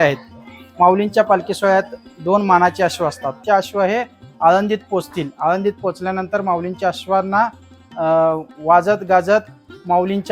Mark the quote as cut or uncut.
cut